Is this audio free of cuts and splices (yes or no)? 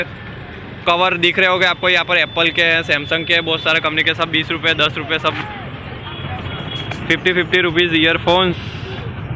no